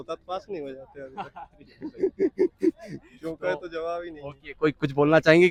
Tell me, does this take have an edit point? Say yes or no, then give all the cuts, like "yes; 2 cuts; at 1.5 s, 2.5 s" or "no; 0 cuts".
no; 0 cuts